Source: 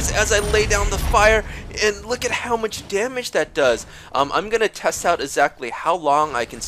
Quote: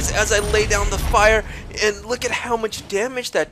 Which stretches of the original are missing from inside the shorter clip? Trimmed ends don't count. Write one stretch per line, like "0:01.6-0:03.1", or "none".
none